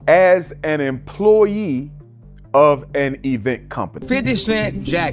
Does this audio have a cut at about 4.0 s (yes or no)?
yes